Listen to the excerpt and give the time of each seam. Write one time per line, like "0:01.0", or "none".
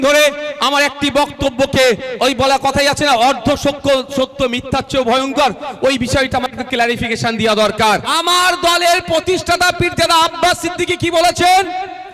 0:08.1